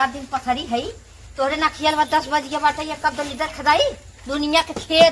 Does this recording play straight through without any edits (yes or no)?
yes